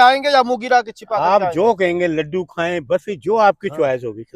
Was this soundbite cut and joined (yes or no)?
no